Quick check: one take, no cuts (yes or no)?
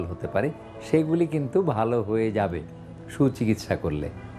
yes